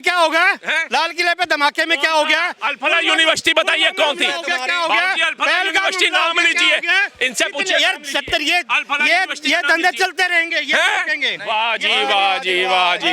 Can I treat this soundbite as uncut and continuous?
yes; 0 cuts

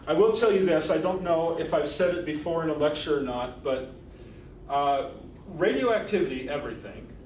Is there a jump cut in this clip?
yes; 1 cut; at 3.5 s

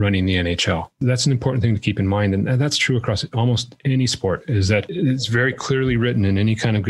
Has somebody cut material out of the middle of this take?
yes; 1 cut; at 0.9 s

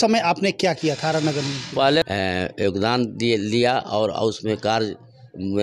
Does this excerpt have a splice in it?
yes; 1 cut; at 2.0 s

